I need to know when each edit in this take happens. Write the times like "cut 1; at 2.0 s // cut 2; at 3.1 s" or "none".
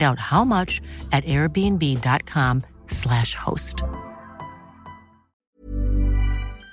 cut 1; at 5.5 s